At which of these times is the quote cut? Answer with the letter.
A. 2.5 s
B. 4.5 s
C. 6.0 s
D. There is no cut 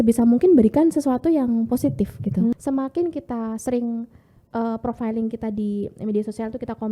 A